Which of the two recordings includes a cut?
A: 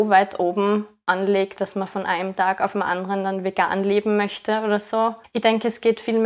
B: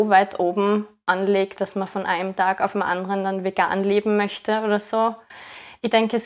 A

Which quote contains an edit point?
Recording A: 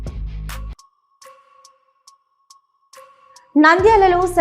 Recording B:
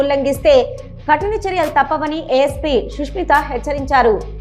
A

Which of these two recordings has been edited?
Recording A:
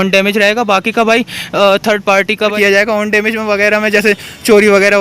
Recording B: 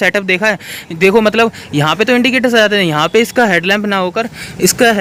A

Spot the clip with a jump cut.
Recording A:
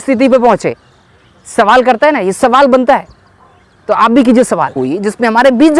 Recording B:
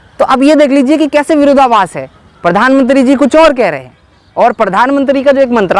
A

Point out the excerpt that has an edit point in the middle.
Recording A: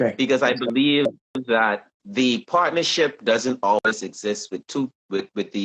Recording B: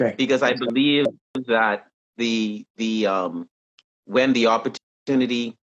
A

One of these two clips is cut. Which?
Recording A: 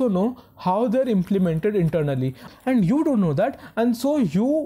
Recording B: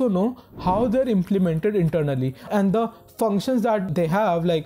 A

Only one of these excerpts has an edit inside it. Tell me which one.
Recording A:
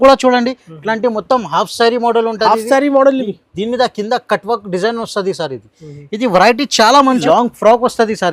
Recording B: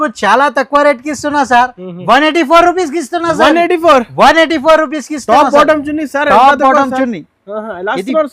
A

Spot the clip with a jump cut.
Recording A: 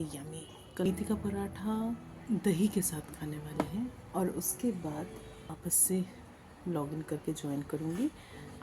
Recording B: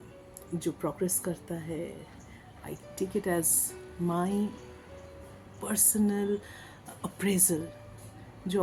A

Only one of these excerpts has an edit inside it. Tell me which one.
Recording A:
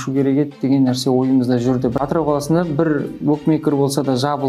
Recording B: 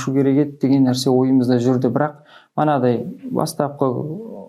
A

